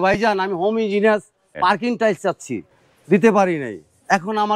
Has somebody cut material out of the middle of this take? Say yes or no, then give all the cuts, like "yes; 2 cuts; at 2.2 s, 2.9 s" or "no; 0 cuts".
yes; 2 cuts; at 1.5 s, 2.7 s